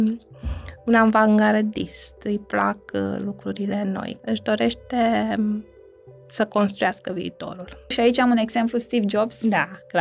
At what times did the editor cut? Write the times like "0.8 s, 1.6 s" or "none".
4.2 s, 7.9 s